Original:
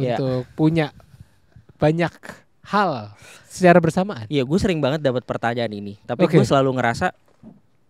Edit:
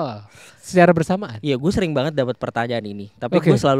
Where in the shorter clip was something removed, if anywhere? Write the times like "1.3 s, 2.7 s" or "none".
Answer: none